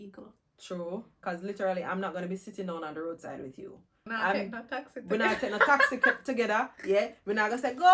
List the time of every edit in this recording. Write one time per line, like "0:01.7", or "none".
0:01.2
0:04.0